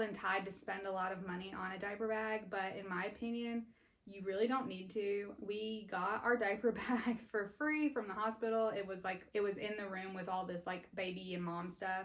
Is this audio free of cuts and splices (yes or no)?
yes